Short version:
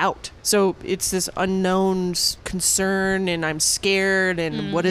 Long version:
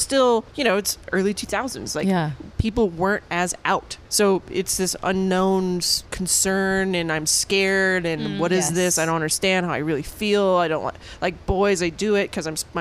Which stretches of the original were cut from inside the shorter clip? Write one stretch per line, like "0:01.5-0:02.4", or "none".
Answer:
none